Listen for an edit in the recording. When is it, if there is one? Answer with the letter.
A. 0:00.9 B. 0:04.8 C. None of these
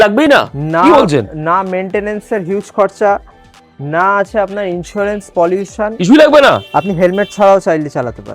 C